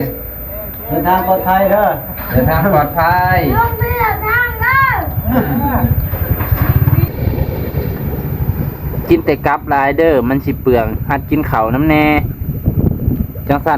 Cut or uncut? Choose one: cut